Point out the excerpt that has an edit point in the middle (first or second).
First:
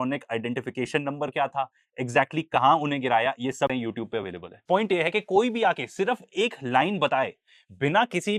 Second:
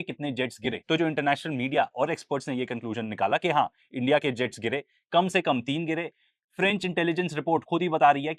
first